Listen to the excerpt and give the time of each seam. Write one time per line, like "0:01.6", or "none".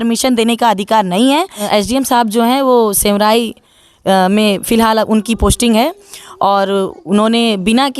0:01.6